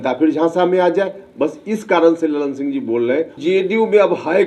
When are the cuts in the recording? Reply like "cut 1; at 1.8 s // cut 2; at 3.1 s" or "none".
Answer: cut 1; at 3.4 s